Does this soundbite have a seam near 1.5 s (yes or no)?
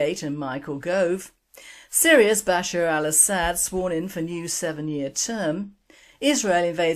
no